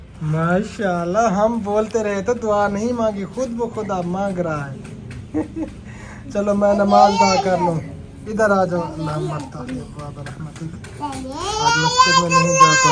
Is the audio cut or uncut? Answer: uncut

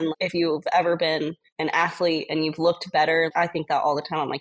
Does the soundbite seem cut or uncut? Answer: cut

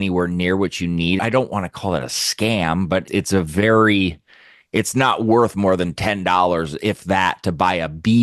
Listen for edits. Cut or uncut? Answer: cut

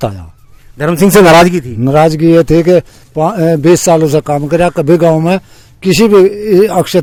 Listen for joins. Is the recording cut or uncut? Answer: uncut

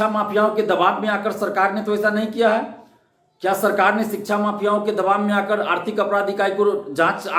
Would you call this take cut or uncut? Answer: uncut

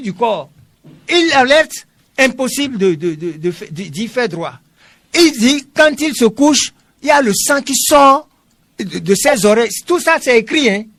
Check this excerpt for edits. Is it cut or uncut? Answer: uncut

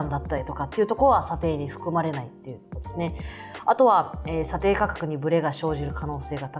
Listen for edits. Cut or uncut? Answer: uncut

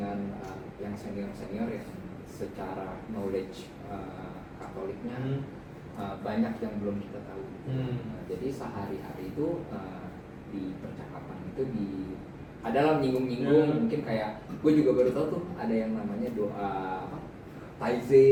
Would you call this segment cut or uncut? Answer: uncut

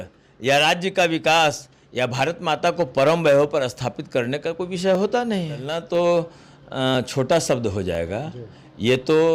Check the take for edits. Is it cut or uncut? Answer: cut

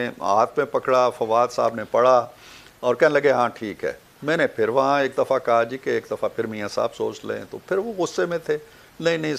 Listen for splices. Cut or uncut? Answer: uncut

